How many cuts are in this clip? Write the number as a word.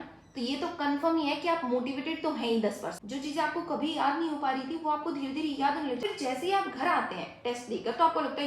two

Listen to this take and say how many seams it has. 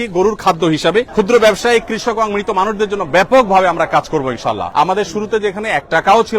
two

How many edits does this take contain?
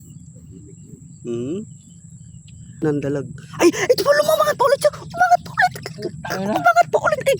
one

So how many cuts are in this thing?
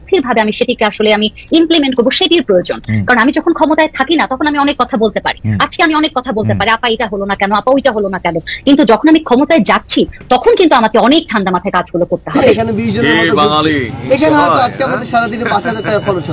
one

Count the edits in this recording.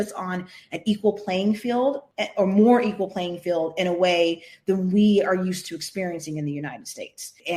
zero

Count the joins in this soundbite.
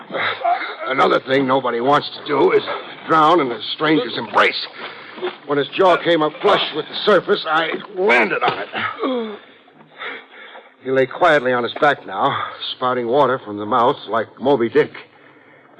one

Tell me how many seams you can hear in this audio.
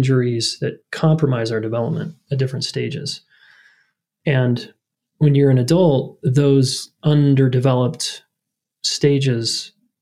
zero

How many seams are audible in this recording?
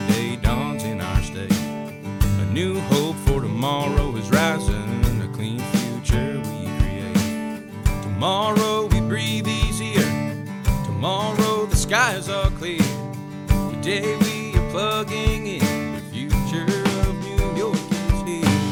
zero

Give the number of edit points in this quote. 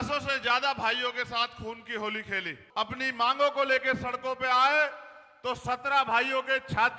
zero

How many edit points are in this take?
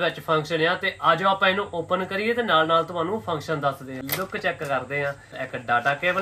two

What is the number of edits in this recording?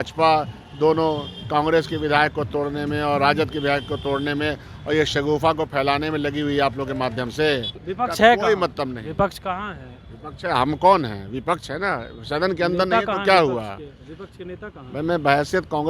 one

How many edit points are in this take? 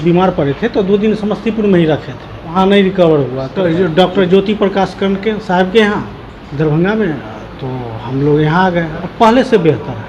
three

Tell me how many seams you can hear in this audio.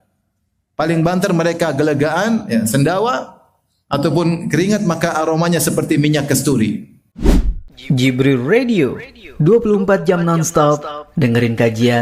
one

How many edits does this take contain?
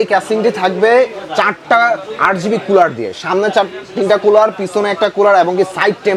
zero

